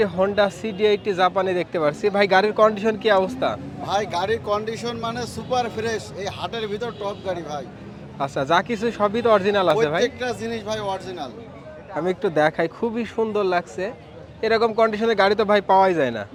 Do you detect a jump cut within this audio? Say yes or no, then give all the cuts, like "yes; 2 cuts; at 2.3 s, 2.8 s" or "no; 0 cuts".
no; 0 cuts